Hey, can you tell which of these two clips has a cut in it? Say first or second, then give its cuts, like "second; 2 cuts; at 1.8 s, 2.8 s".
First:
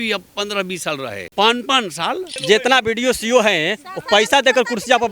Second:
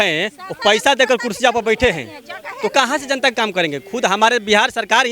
first; 2 cuts; at 1.2 s, 2.3 s